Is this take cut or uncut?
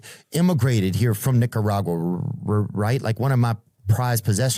uncut